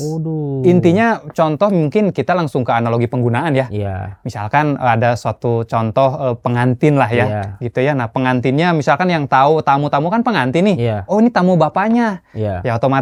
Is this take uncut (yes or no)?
yes